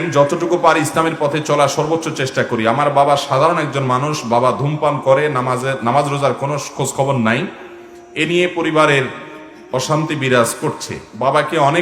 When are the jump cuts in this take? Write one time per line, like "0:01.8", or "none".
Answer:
none